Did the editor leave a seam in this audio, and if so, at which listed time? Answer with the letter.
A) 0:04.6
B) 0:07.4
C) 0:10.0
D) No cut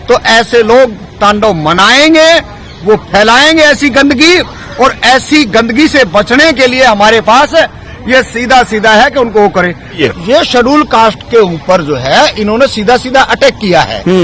C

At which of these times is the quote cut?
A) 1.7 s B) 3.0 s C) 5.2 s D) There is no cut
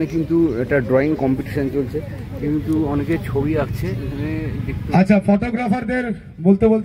D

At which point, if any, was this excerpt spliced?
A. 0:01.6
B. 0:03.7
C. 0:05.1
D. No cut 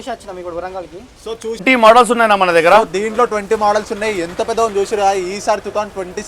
A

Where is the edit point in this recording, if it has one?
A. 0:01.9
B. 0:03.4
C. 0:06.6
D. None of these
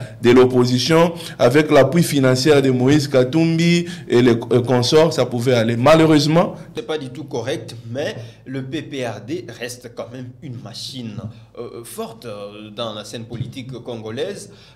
C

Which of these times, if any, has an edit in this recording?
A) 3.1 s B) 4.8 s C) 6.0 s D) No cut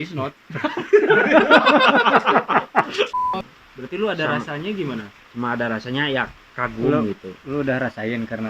A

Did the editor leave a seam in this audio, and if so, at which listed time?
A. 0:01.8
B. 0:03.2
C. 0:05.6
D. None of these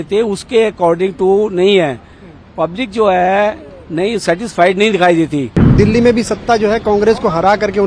C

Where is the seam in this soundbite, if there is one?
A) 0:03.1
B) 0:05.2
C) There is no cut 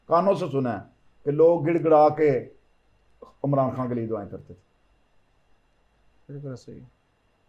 C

